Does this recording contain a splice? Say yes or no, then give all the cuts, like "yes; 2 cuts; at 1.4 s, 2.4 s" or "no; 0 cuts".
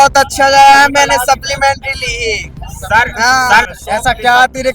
yes; 1 cut; at 3.7 s